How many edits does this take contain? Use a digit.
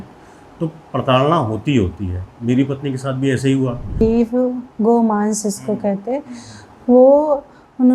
1